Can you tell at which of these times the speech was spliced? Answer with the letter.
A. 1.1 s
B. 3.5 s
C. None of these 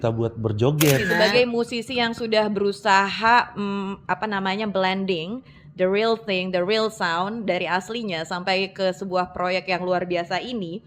A